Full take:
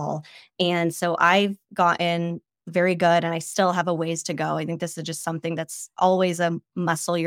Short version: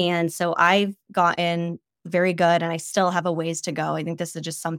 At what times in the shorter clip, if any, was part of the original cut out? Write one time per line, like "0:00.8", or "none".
none